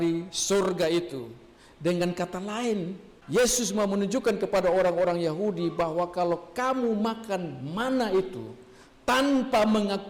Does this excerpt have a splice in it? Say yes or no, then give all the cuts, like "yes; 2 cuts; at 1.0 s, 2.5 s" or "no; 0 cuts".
no; 0 cuts